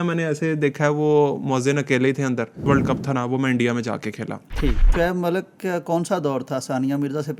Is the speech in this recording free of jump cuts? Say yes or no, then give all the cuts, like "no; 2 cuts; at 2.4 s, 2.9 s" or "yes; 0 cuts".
no; 2 cuts; at 2.6 s, 4.9 s